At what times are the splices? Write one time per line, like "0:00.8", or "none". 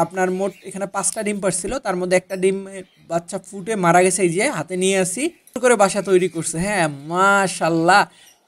0:05.6